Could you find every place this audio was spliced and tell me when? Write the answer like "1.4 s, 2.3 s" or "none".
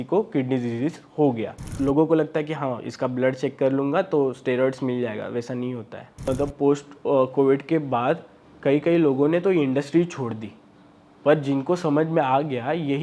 1.7 s, 6.2 s